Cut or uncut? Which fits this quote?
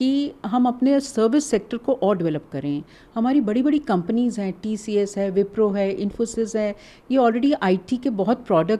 uncut